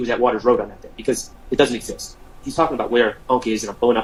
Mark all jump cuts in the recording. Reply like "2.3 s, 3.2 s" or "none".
none